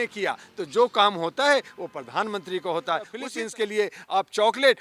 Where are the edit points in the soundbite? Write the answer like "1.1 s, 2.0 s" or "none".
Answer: 3.2 s